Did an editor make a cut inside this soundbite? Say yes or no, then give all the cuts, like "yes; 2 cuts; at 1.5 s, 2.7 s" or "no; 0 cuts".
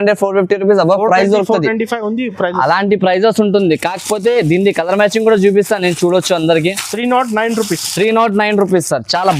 no; 0 cuts